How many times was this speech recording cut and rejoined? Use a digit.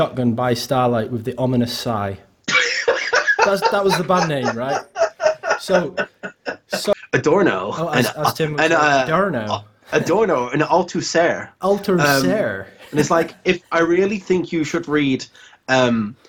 1